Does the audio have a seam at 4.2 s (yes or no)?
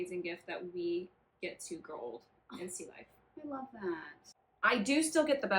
yes